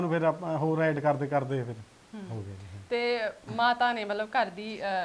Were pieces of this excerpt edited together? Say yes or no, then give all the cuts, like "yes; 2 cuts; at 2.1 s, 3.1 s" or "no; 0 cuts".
no; 0 cuts